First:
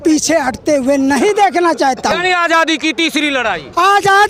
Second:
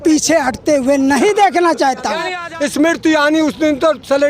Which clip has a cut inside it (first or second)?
second